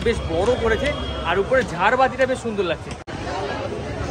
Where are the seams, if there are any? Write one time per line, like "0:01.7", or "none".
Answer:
0:03.1